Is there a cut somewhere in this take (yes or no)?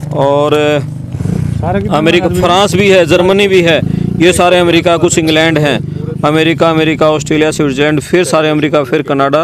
no